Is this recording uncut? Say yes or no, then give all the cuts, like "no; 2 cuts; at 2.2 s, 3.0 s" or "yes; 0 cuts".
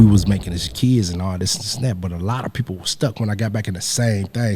yes; 0 cuts